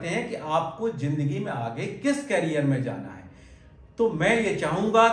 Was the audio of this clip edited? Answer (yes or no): no